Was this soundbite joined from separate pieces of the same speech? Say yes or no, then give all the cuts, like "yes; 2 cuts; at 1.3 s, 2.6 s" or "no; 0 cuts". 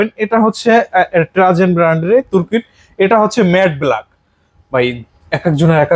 no; 0 cuts